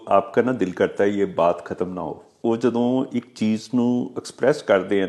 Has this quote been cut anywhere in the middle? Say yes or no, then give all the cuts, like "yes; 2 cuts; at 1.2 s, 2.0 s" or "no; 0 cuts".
yes; 1 cut; at 2.2 s